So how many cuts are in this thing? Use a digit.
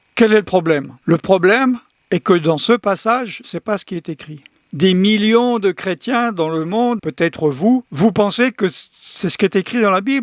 4